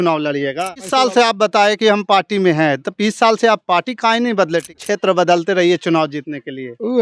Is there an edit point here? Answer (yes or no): yes